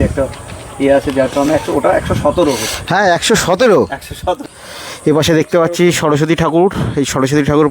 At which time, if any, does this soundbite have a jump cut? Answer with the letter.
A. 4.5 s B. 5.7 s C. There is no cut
A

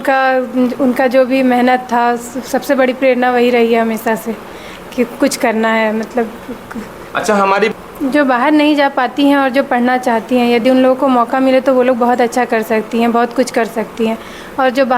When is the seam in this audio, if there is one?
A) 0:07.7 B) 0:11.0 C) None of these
A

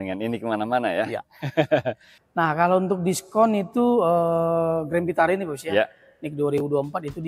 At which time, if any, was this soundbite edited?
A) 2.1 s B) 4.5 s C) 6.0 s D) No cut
A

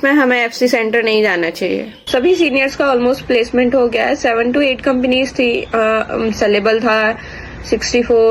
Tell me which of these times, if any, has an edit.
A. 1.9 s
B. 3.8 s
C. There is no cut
A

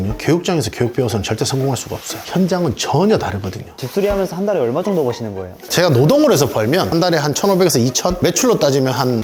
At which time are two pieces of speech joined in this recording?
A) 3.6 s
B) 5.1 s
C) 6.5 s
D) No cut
A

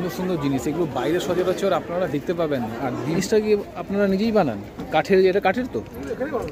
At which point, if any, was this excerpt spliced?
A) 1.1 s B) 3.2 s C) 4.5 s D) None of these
B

